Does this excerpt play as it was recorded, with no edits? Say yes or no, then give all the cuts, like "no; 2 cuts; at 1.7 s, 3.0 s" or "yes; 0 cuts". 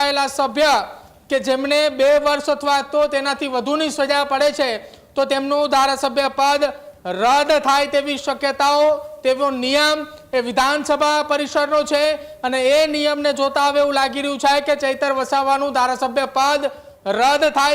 yes; 0 cuts